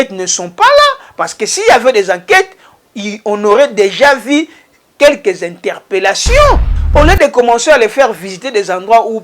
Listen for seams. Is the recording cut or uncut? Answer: cut